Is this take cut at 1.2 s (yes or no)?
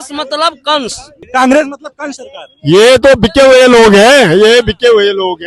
yes